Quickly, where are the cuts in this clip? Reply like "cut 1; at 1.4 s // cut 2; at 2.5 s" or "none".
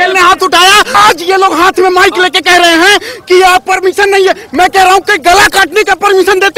cut 1; at 0.9 s